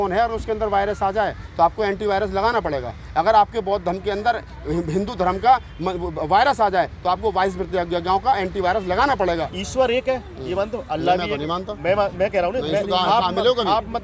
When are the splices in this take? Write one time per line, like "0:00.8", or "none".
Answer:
0:09.5